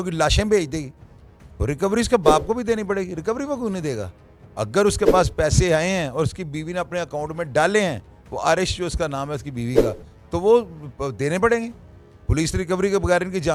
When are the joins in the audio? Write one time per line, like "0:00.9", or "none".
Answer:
none